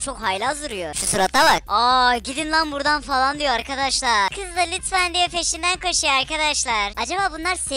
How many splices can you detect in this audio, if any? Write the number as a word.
two